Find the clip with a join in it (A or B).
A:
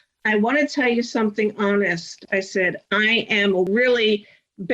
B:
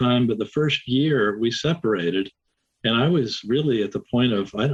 A